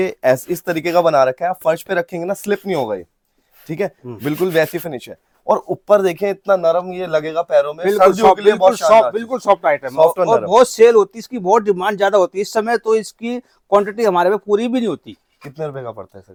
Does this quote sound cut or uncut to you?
uncut